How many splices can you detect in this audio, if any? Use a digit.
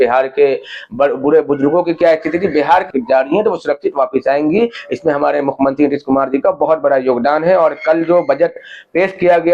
1